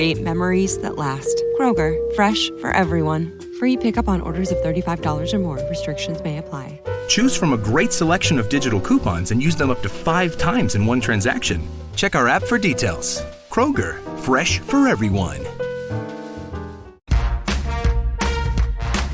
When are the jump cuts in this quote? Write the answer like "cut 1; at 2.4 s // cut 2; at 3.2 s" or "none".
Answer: cut 1; at 16.9 s